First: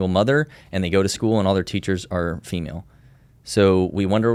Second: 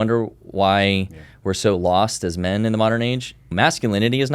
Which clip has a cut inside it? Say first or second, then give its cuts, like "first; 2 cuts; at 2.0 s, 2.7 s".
second; 1 cut; at 3.4 s